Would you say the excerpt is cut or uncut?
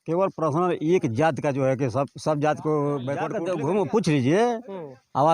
cut